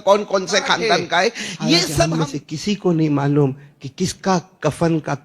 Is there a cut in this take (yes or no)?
yes